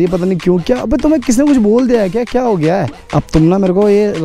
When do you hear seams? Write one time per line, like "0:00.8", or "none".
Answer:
0:03.0